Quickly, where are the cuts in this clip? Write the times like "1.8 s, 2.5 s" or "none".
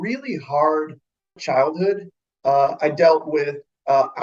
1.4 s